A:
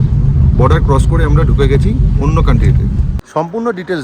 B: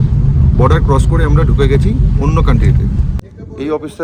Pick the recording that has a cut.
A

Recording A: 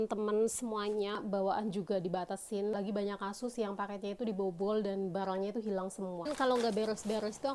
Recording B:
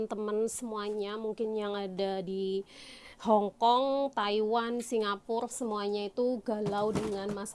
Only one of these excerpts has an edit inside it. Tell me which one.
A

